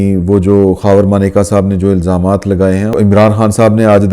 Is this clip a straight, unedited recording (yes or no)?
no